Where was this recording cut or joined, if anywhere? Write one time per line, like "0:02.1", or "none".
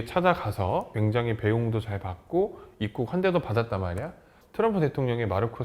0:00.9
0:04.3